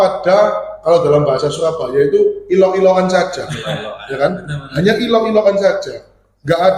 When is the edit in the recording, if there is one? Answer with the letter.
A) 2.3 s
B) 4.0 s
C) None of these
C